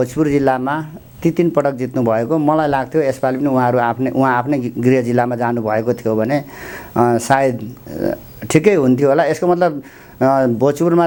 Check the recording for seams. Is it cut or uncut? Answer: uncut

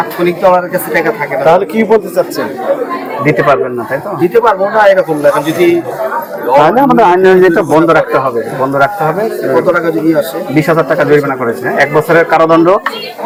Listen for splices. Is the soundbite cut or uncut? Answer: uncut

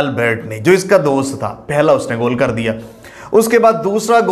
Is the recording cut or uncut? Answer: uncut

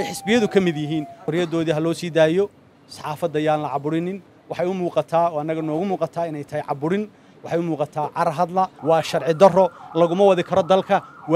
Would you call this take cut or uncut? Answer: cut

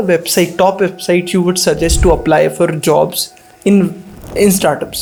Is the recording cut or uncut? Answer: uncut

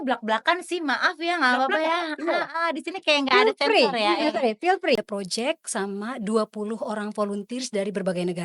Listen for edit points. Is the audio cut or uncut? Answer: cut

